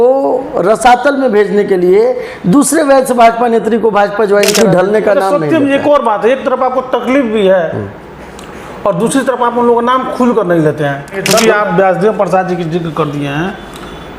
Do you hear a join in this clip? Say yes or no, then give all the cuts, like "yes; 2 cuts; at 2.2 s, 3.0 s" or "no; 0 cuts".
yes; 2 cuts; at 4.5 s, 11.3 s